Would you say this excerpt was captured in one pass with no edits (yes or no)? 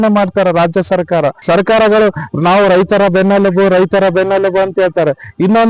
no